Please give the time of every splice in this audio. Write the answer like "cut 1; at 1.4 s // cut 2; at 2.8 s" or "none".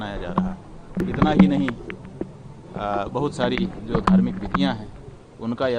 cut 1; at 1.0 s